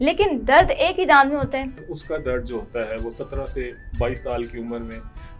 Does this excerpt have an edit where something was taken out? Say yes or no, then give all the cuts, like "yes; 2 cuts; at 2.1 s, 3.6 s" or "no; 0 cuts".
yes; 1 cut; at 1.8 s